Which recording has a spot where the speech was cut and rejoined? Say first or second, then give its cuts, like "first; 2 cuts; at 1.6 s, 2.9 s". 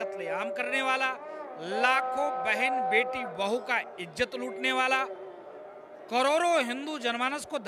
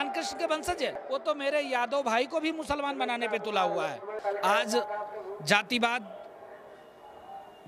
second; 2 cuts; at 1.0 s, 4.2 s